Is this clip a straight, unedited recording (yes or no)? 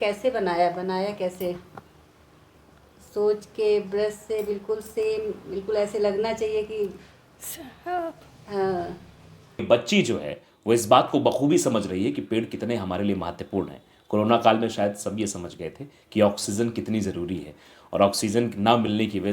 no